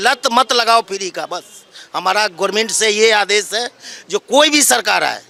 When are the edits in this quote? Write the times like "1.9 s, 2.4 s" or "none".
none

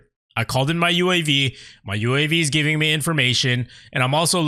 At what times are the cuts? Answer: none

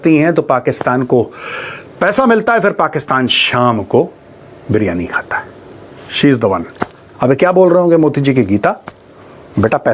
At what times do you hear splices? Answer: none

